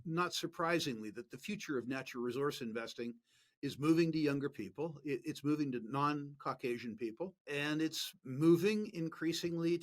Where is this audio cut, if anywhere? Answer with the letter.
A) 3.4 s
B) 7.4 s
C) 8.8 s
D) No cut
B